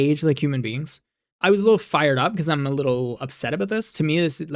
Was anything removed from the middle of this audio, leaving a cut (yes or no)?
yes